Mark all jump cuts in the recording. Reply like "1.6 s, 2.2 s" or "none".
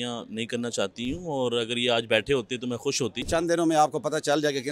3.3 s